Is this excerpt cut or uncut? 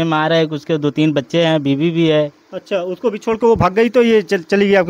uncut